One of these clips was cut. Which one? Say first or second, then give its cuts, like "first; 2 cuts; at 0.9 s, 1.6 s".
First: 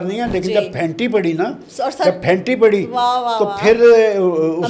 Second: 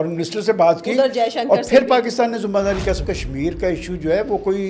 second; 1 cut; at 3.0 s